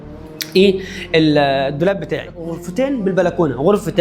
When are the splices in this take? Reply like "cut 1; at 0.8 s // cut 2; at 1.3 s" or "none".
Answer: cut 1; at 2.6 s